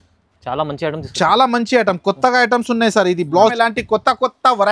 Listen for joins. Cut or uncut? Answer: cut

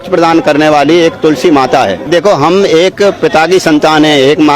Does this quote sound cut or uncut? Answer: cut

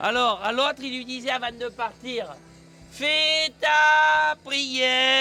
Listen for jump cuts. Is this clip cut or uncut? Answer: uncut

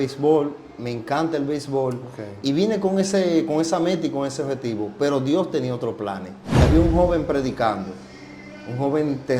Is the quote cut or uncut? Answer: cut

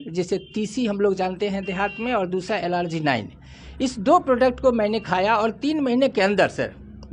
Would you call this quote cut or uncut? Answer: uncut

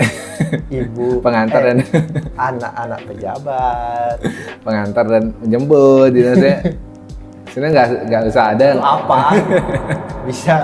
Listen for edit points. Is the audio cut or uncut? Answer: uncut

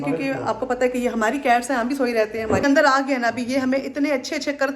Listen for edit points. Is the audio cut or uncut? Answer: cut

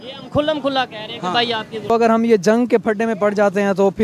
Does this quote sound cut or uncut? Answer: cut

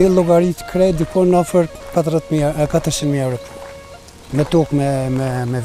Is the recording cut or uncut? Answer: uncut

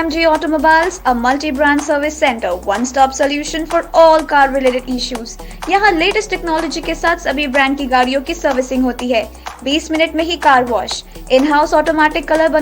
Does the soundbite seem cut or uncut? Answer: uncut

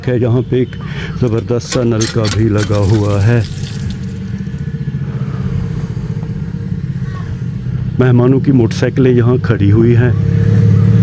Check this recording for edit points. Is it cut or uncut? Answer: uncut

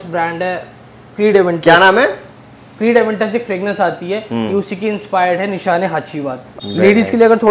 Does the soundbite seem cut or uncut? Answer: cut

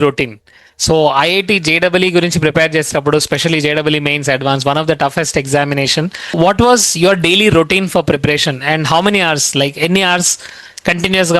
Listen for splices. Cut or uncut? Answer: cut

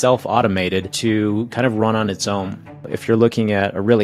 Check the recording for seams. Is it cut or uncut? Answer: cut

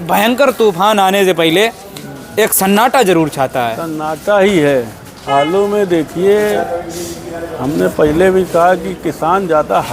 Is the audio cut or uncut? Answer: uncut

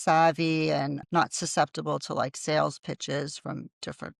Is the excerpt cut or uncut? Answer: cut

